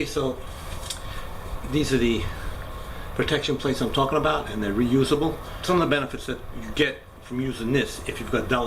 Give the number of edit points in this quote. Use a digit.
1